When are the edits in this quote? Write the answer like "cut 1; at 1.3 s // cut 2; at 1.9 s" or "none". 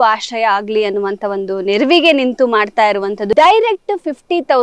cut 1; at 3.3 s